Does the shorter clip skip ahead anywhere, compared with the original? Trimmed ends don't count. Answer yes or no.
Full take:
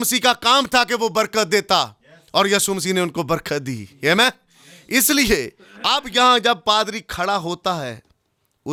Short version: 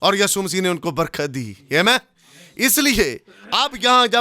no